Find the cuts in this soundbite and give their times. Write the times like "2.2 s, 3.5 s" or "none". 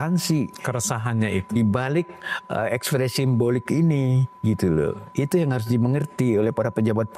none